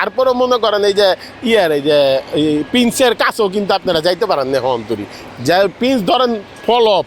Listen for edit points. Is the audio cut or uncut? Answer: uncut